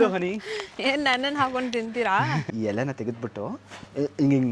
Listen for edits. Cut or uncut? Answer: cut